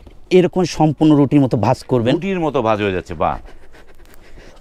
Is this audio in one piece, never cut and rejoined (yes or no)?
yes